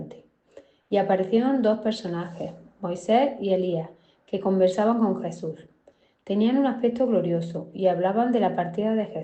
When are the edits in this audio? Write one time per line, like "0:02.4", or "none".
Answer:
none